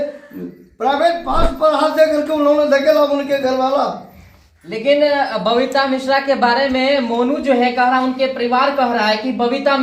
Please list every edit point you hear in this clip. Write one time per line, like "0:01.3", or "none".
none